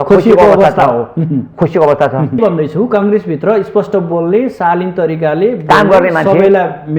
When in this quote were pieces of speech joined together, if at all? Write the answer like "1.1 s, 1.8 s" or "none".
2.4 s